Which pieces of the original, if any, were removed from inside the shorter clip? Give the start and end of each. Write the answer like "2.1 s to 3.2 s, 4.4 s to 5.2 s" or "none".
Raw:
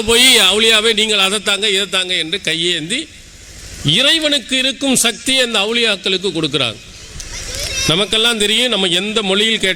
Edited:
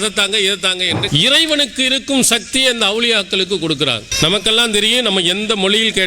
2.3 s to 3.8 s, 6.8 s to 7.7 s